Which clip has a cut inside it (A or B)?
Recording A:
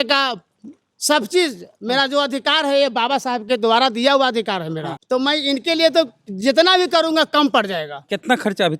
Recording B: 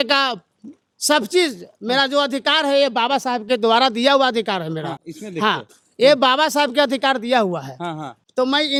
A